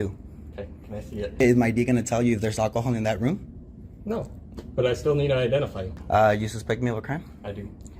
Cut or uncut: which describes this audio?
cut